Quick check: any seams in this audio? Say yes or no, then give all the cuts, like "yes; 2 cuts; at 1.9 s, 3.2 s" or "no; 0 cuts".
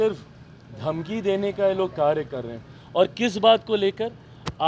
no; 0 cuts